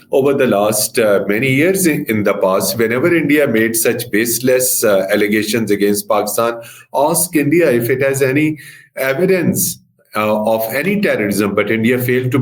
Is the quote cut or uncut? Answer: uncut